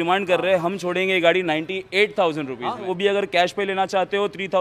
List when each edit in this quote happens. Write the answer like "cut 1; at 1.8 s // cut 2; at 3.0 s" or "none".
cut 1; at 2.9 s